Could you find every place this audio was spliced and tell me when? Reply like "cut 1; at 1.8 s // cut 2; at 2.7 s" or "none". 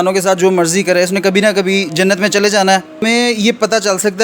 cut 1; at 3.0 s

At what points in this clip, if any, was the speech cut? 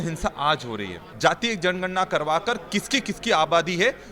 cut 1; at 1.0 s

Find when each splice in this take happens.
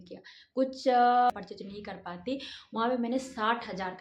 cut 1; at 1.3 s

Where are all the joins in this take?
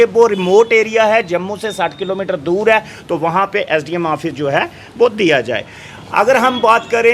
none

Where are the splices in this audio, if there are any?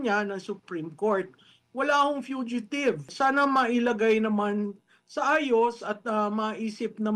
cut 1; at 3.1 s

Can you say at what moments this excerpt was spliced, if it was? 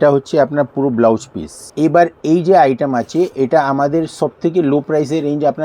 cut 1; at 1.7 s

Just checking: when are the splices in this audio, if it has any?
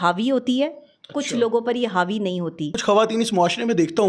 cut 1; at 2.8 s

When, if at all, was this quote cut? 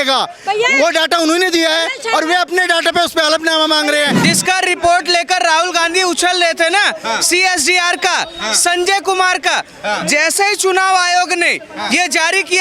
cut 1; at 4.2 s

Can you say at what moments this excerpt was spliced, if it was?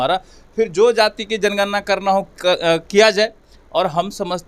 none

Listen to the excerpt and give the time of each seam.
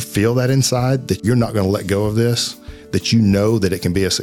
cut 1; at 1.2 s

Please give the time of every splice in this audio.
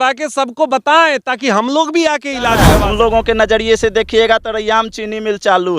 cut 1; at 2.6 s

